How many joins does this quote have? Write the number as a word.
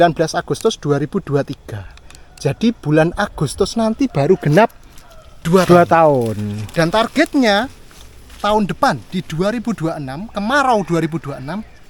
zero